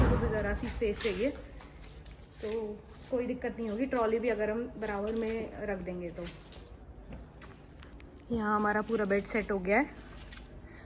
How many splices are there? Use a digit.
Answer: 0